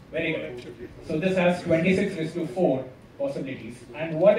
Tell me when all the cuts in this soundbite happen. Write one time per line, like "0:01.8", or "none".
none